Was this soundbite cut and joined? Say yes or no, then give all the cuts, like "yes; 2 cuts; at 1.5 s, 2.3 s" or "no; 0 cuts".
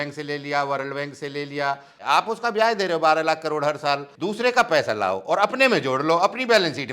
yes; 2 cuts; at 2.0 s, 4.1 s